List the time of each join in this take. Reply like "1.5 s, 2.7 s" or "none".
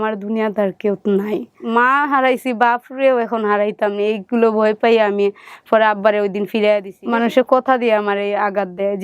1.5 s, 6.9 s